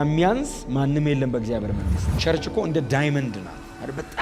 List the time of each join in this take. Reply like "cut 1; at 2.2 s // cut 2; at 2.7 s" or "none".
cut 1; at 2.0 s